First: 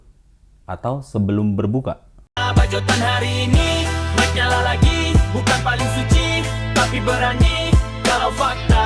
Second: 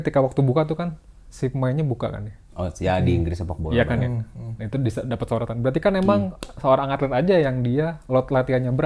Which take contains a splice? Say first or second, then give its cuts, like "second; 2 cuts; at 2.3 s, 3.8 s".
first; 1 cut; at 2.5 s